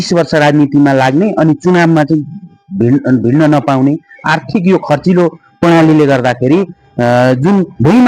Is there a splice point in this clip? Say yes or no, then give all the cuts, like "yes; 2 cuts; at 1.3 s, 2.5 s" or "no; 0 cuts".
no; 0 cuts